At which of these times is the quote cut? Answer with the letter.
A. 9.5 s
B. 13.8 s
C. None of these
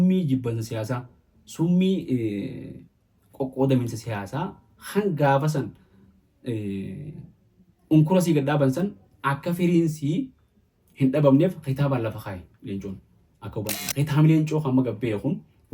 B